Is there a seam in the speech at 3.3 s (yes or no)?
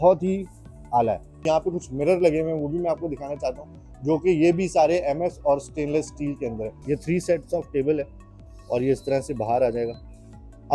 no